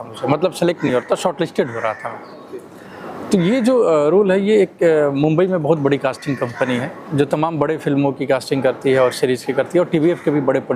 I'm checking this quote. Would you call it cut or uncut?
uncut